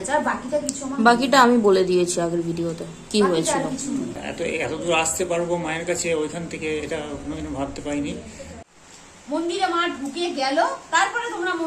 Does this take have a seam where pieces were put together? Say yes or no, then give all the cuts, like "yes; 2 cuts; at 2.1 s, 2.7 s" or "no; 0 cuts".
yes; 2 cuts; at 4.2 s, 8.7 s